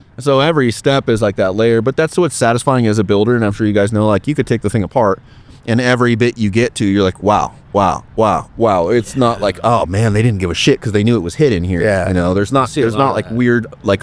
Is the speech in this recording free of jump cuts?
yes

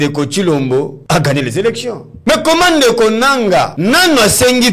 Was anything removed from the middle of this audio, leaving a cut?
yes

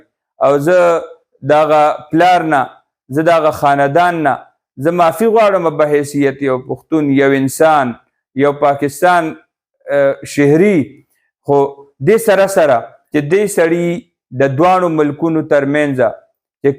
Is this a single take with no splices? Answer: no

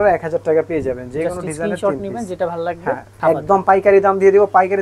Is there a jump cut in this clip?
yes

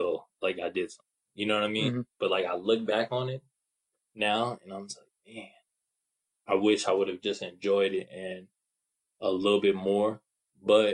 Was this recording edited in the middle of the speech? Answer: no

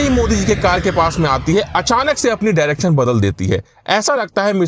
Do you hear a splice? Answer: no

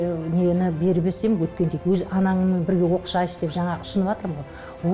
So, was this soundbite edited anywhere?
yes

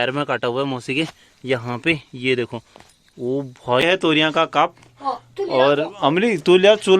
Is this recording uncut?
no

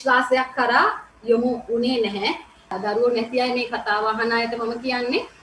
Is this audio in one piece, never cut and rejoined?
no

